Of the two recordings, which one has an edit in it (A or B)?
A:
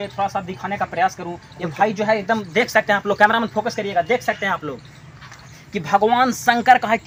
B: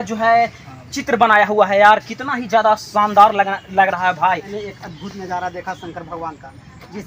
B